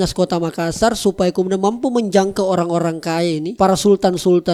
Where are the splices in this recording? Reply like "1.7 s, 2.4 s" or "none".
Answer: none